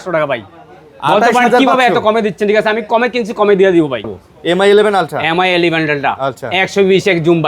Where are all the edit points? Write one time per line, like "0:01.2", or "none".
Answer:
0:04.1